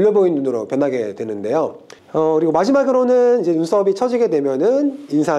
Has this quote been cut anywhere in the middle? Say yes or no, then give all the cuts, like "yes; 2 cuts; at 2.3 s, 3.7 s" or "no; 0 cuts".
yes; 1 cut; at 1.8 s